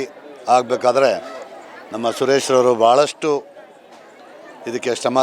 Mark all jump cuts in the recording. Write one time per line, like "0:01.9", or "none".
none